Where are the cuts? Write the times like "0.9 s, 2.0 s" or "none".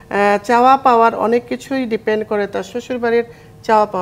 none